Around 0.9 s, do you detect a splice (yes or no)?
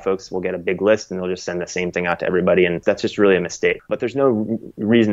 no